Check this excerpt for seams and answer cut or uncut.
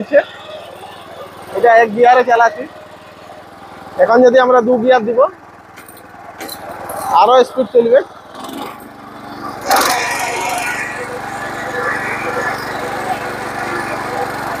uncut